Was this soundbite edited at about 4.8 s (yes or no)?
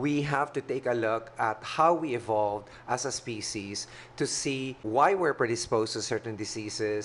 yes